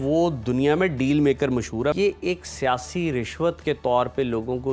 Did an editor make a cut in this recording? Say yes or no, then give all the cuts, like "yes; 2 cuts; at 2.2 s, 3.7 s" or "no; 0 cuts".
yes; 1 cut; at 1.9 s